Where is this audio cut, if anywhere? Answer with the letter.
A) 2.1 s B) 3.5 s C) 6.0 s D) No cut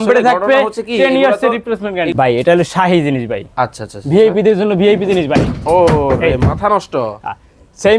A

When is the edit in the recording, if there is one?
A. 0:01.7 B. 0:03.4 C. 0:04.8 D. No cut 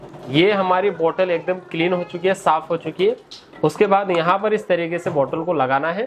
D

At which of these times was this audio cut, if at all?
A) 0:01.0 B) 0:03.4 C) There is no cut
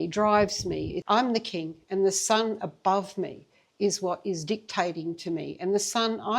A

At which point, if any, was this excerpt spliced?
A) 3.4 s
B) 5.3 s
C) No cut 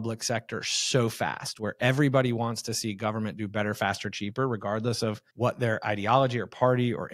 B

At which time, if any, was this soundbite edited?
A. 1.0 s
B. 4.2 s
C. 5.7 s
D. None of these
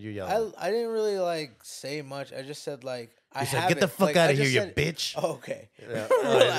D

